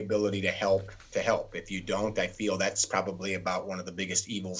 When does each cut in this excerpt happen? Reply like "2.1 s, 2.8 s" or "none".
1.0 s